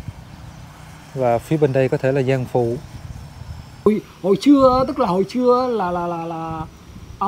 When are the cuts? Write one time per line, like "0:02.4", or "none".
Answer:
0:03.9